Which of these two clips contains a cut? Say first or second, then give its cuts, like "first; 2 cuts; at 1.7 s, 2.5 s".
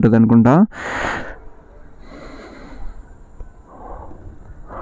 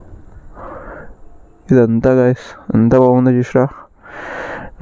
first; 1 cut; at 1.2 s